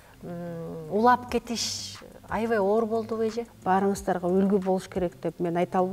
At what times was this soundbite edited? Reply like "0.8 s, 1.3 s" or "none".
3.5 s